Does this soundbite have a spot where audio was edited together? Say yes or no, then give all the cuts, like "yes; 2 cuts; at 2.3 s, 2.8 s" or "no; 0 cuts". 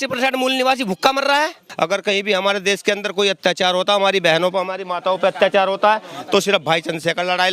yes; 1 cut; at 1.6 s